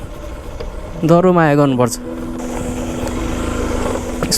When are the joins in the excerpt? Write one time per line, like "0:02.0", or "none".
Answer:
0:02.3